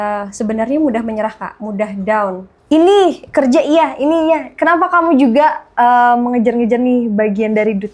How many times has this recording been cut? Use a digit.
1